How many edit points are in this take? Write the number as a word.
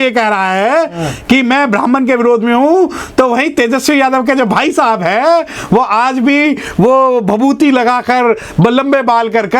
zero